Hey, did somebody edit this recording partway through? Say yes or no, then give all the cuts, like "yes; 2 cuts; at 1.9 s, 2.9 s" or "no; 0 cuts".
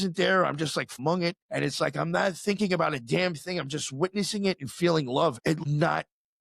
yes; 2 cuts; at 1.0 s, 5.7 s